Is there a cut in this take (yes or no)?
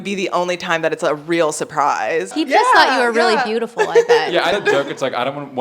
yes